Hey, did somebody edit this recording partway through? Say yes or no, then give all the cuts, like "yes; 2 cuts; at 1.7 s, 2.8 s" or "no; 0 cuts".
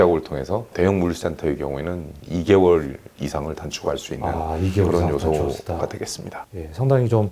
no; 0 cuts